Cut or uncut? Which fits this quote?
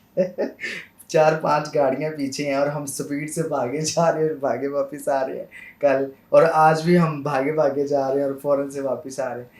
uncut